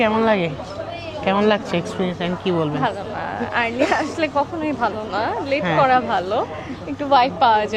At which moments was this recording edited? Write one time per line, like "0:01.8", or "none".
none